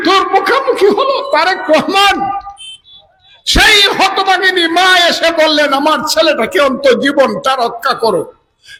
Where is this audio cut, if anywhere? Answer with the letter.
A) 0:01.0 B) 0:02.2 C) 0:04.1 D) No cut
D